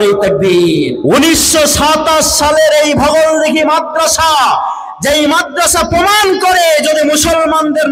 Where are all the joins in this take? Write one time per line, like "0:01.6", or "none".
0:01.0